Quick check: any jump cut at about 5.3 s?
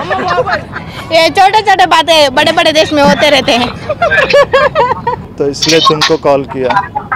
yes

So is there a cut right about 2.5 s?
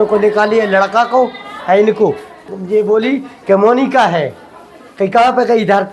yes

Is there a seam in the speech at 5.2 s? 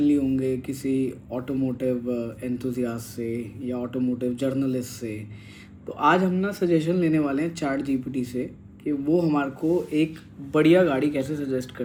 no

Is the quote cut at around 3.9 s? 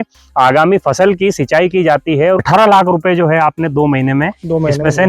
no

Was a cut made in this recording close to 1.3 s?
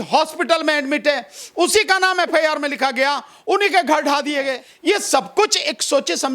no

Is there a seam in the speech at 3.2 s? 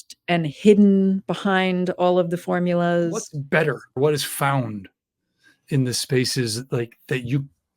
no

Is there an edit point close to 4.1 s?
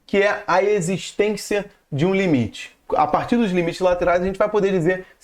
no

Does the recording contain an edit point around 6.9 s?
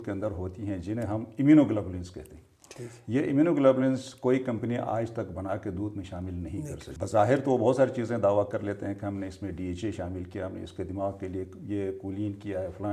yes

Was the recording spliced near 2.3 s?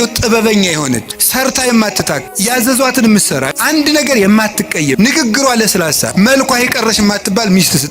yes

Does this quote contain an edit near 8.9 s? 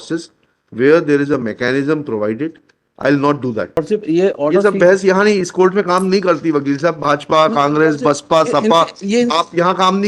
no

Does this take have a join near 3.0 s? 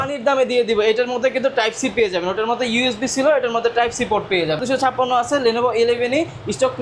no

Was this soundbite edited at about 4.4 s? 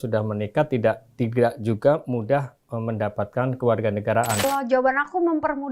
yes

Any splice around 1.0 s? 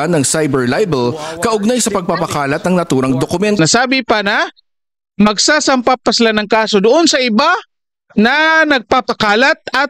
no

